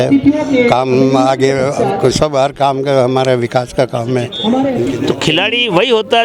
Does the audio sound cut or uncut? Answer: cut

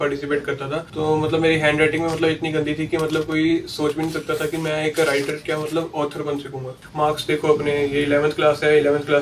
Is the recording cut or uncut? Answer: cut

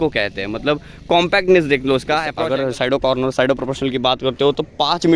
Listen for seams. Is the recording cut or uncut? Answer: cut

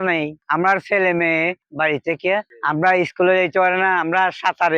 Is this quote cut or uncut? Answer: cut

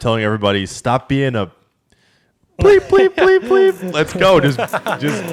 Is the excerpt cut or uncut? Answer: uncut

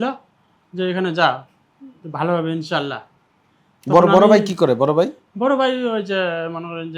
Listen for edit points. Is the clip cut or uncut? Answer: uncut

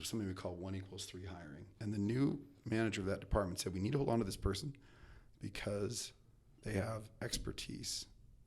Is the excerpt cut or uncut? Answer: cut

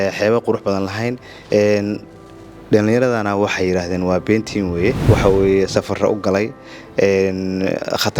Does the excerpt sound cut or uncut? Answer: cut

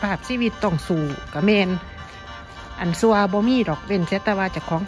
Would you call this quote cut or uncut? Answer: uncut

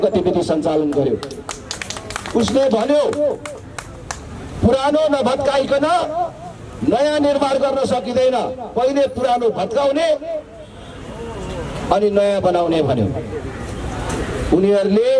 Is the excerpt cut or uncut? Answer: uncut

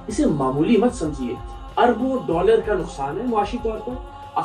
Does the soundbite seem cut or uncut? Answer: uncut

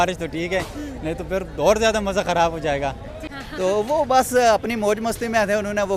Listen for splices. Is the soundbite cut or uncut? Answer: uncut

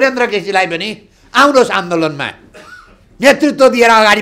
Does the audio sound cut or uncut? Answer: uncut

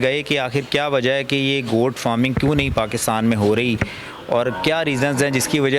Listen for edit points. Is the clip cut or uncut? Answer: uncut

